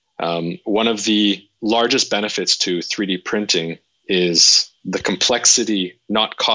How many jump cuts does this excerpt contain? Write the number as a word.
one